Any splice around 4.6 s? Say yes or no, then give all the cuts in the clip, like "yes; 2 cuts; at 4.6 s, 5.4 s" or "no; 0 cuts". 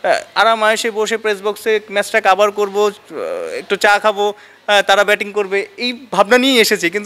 no; 0 cuts